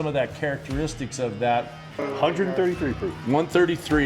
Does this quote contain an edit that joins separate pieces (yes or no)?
yes